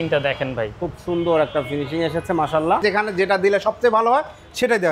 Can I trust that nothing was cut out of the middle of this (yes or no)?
no